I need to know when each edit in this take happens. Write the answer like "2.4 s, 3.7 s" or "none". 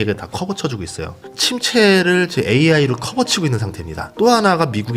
1.2 s, 4.0 s